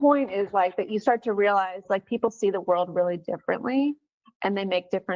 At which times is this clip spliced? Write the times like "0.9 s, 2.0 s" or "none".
none